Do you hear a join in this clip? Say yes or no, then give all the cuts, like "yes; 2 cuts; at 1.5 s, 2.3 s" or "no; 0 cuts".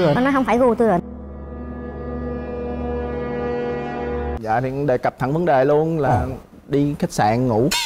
yes; 1 cut; at 4.3 s